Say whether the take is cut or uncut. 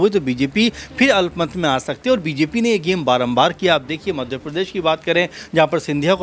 uncut